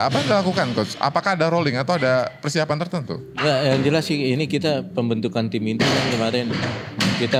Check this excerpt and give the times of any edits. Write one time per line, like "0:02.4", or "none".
none